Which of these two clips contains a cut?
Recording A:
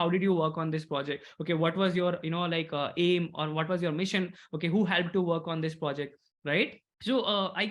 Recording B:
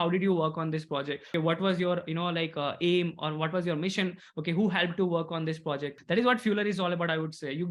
B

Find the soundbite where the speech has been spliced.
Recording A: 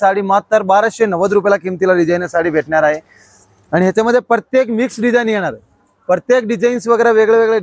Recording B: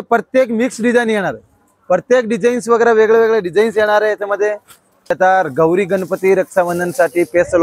B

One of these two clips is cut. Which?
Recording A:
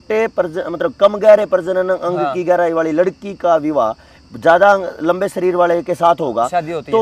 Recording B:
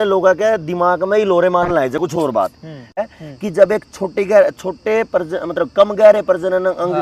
B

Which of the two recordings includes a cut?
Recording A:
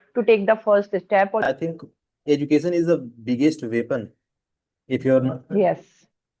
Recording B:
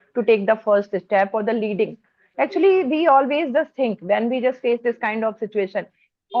A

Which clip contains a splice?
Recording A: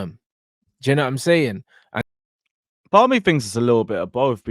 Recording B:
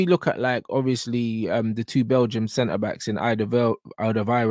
A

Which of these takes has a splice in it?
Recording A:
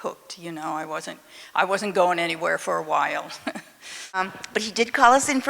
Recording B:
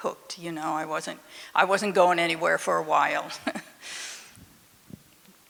A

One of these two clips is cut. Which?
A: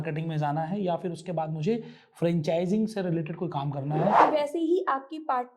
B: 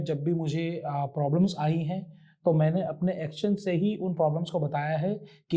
A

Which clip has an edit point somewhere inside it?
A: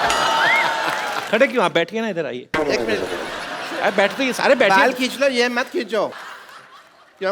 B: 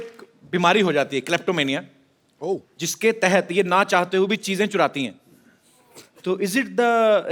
A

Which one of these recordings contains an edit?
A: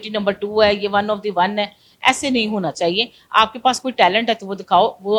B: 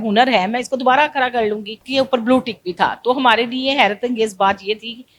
B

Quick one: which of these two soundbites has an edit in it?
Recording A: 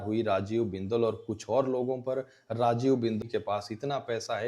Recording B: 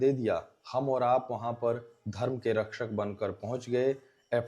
A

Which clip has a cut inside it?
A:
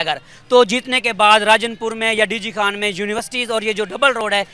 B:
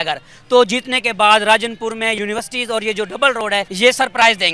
B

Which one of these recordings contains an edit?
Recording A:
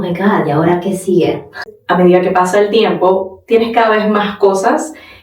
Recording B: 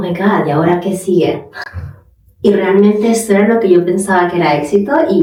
A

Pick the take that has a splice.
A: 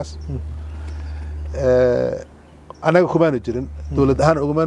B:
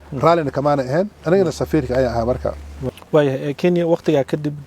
B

